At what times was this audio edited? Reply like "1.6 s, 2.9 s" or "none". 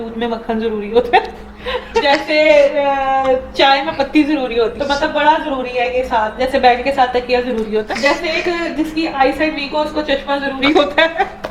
2.0 s, 4.8 s, 7.8 s